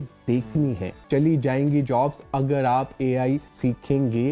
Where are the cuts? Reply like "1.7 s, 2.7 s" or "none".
1.0 s, 3.5 s